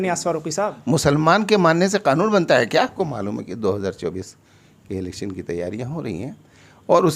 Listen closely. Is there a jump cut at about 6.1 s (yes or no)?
no